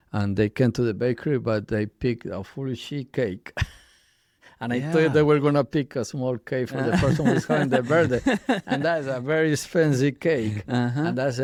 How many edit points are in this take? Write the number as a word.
zero